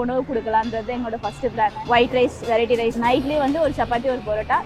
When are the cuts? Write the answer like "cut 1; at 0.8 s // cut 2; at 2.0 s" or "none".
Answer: cut 1; at 1.8 s // cut 2; at 3.0 s